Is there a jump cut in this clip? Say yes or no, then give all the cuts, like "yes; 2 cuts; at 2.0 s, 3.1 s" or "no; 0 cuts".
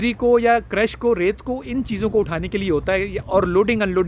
no; 0 cuts